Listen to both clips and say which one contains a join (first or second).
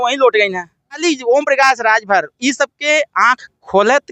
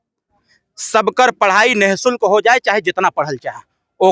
first